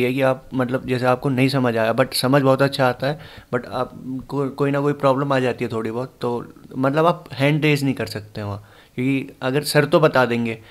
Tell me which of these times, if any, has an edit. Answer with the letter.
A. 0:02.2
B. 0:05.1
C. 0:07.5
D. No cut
D